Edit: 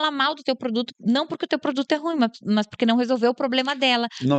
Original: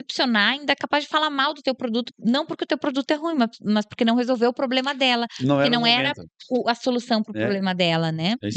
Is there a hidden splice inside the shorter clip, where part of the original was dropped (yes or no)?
no